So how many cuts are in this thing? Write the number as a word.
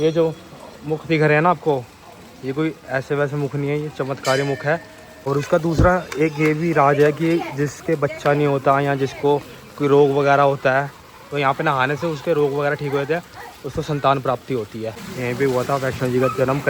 two